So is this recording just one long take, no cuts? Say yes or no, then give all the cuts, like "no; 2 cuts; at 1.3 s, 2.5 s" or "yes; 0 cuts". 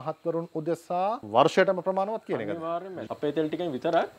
no; 2 cuts; at 1.2 s, 2.9 s